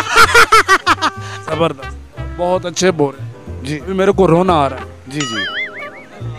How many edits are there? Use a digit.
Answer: 1